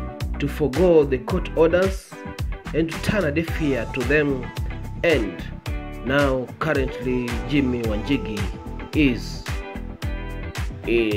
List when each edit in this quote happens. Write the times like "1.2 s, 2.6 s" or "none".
none